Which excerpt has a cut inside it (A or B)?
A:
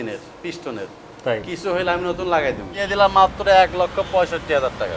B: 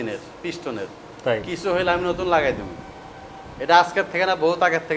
A